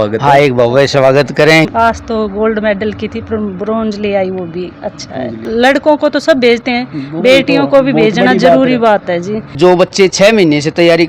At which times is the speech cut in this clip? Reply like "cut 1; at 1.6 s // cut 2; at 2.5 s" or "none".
cut 1; at 1.7 s // cut 2; at 5.4 s // cut 3; at 9.5 s